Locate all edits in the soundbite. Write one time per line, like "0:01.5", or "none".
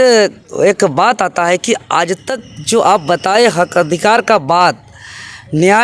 none